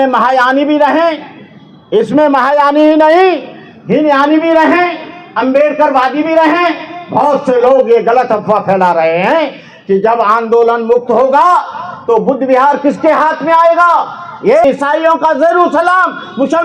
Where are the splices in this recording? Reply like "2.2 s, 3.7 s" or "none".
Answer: 14.6 s